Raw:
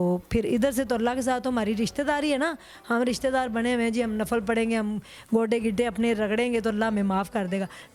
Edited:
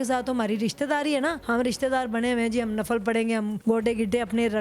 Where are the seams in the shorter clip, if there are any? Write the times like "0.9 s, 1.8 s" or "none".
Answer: 1.4 s, 3.6 s